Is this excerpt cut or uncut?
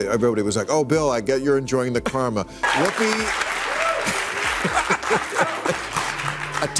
cut